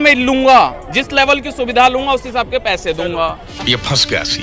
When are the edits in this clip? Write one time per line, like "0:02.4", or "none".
0:03.4